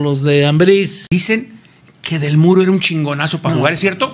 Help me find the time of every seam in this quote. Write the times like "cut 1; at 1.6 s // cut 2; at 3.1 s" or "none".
cut 1; at 1.0 s